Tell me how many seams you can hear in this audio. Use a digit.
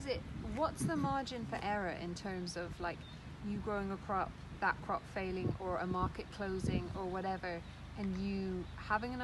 0